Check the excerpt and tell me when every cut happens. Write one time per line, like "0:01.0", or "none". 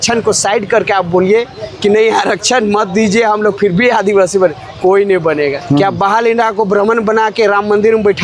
0:05.6